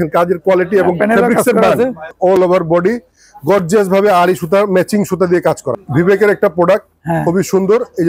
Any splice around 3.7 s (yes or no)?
no